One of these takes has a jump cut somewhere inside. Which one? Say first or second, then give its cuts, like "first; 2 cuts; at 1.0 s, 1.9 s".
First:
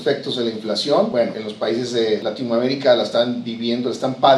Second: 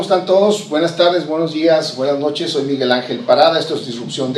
first; 2 cuts; at 1.2 s, 2.2 s